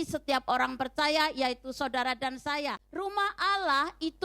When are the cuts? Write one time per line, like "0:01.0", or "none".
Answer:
0:02.8